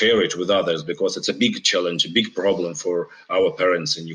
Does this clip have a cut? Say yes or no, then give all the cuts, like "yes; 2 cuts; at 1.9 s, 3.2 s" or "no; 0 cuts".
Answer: no; 0 cuts